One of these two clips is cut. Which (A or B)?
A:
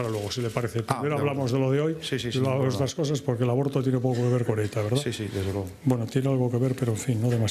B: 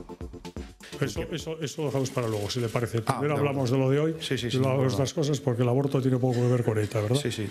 B